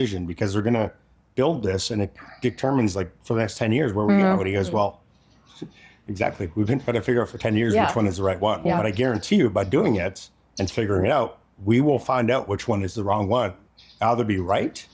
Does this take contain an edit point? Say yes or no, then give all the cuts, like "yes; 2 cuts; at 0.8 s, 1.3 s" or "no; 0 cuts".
yes; 1 cut; at 8.6 s